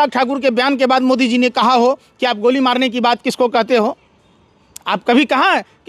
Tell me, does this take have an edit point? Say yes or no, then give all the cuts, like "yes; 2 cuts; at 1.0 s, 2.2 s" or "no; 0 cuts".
no; 0 cuts